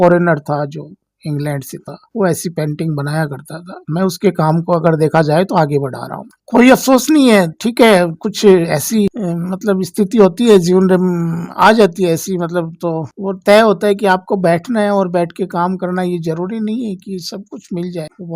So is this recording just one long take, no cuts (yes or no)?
yes